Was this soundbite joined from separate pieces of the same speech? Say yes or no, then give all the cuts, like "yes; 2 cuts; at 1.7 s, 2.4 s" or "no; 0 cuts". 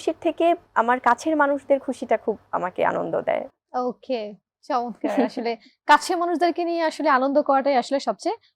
no; 0 cuts